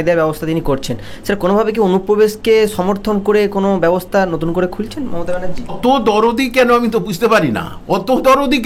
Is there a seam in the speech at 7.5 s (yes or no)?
no